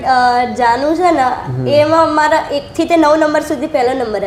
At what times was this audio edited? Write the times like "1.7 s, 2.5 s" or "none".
none